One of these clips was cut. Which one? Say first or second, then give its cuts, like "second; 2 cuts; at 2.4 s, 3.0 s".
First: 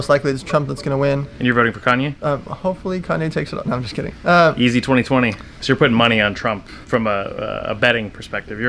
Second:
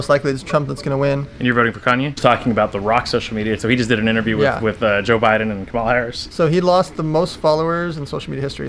second; 3 cuts; at 2.2 s, 3.6 s, 6.2 s